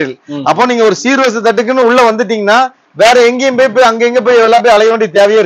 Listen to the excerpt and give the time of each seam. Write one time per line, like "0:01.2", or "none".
none